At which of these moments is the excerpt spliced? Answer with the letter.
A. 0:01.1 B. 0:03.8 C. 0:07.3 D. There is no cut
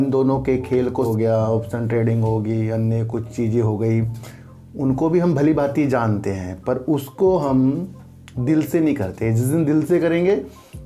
A